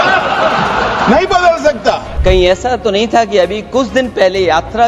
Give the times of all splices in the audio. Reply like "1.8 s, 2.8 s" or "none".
2.1 s